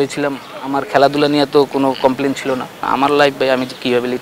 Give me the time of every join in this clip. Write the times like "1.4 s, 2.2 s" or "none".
2.8 s